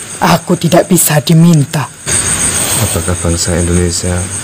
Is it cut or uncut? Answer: cut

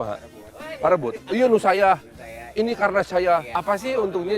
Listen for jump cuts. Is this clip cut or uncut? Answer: cut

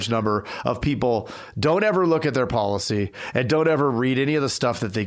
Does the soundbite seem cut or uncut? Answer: uncut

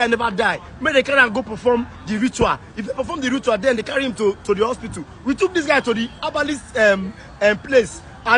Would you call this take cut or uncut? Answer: uncut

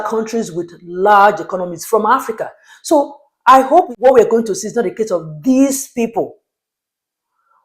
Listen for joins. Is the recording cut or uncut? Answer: cut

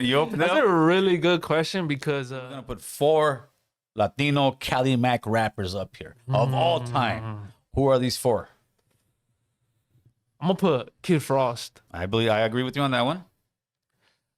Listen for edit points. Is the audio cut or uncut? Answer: cut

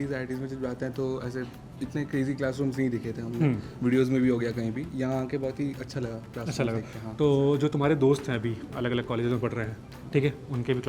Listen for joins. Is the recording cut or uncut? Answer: uncut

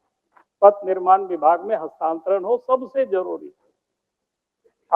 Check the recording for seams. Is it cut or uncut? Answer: uncut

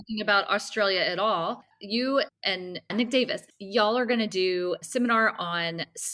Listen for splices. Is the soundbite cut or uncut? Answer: cut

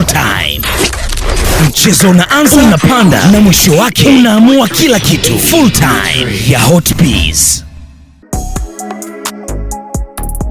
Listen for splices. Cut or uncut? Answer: uncut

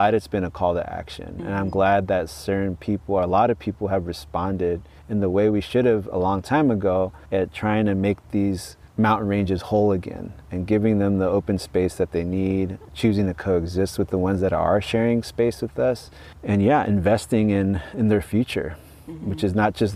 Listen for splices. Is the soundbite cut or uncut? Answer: uncut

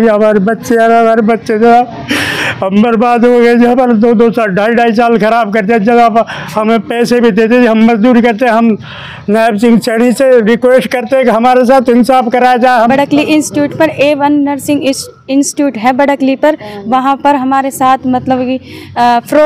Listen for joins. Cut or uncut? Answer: cut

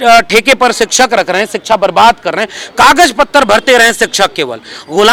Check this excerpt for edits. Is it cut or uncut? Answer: uncut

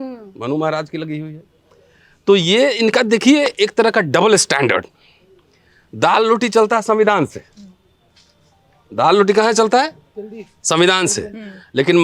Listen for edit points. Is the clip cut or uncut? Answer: uncut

